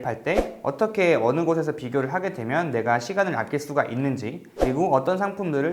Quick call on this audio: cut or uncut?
uncut